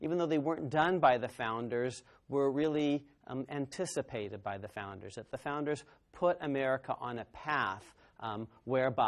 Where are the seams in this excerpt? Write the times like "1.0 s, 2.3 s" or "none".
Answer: 6.3 s